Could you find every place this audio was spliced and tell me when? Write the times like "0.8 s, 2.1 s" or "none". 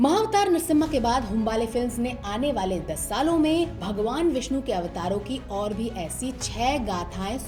none